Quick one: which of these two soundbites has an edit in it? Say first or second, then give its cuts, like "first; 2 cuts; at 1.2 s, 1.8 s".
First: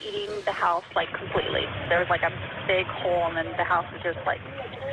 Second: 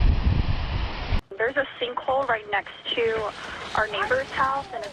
first; 1 cut; at 2.5 s